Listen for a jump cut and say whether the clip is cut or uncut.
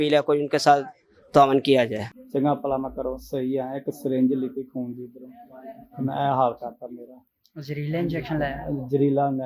cut